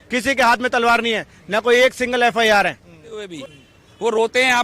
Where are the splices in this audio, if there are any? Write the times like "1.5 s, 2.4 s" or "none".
3.3 s

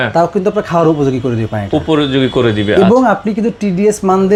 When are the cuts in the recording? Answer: none

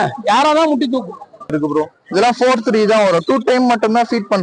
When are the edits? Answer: 1.5 s

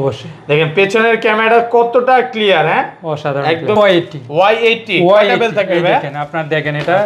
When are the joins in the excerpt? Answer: 3.8 s

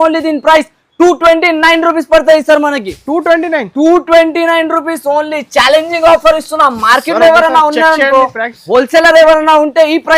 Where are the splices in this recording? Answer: none

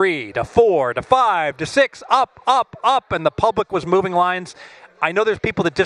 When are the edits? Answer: none

